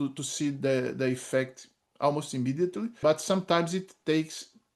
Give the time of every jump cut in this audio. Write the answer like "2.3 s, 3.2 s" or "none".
3.0 s